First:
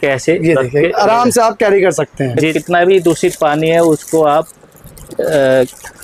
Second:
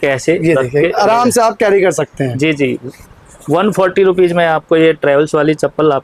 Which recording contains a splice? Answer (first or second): first